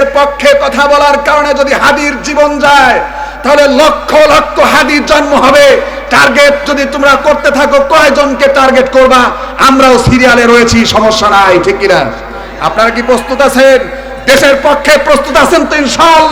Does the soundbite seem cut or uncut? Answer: uncut